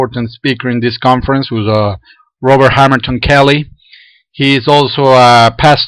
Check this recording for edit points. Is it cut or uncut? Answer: cut